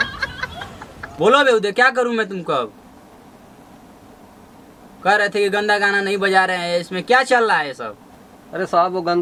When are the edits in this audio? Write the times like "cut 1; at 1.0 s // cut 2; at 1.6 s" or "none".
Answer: none